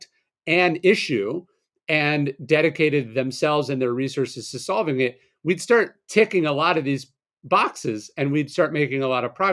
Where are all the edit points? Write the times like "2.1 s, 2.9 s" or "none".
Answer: none